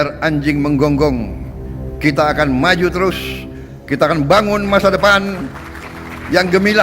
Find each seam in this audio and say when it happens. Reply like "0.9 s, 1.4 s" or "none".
none